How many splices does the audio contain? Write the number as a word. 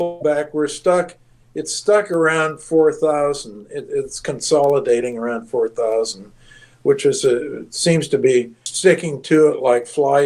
one